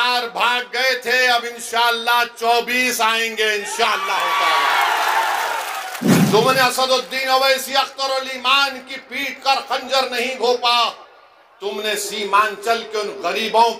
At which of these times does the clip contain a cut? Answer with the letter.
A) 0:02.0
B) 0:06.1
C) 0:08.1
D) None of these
B